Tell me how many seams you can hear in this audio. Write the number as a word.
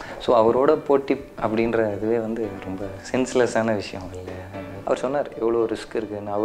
one